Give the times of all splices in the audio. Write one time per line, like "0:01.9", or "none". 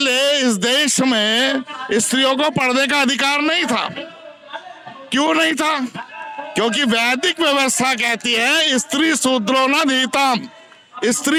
none